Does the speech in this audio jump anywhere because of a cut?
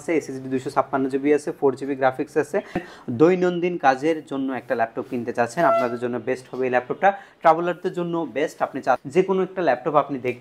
yes; 2 cuts; at 2.8 s, 9.0 s

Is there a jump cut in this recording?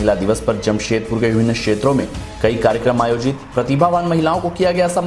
no; 0 cuts

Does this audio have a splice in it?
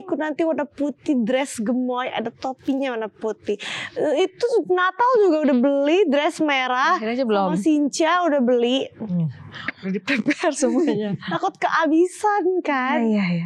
no; 0 cuts

